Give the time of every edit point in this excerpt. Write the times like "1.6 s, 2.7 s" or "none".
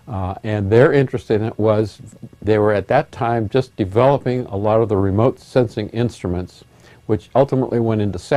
7.5 s